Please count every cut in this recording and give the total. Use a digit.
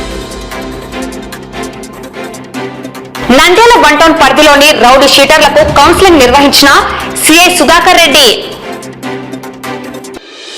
1